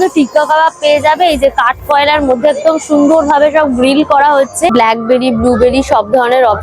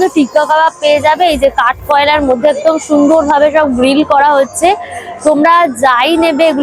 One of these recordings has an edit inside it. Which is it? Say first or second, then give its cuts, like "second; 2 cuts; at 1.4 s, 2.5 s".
first; 1 cut; at 4.8 s